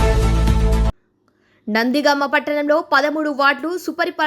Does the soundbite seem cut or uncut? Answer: cut